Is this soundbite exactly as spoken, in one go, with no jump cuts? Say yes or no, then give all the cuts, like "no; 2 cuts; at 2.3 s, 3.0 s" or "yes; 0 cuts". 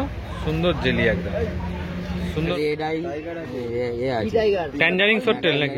no; 1 cut; at 2.5 s